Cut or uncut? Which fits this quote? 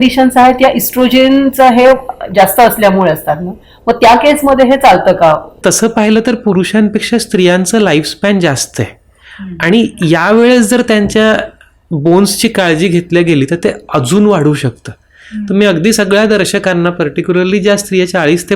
cut